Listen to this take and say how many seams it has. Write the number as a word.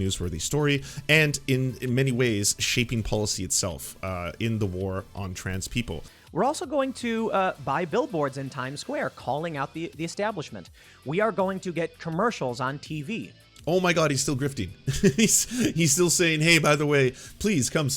one